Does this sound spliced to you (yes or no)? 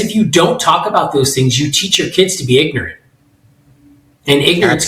no